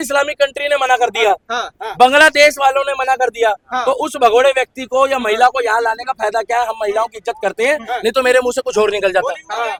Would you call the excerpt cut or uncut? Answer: uncut